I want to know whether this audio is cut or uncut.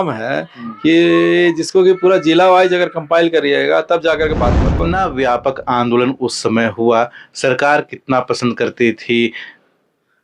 cut